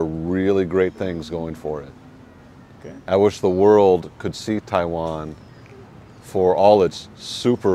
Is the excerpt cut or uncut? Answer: uncut